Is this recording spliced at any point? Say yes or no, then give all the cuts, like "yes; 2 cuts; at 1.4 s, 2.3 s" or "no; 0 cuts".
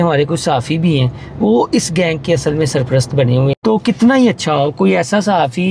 yes; 1 cut; at 3.5 s